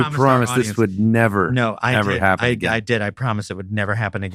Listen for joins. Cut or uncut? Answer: uncut